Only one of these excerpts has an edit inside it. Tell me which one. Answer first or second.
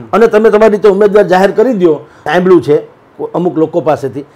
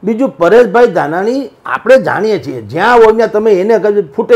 first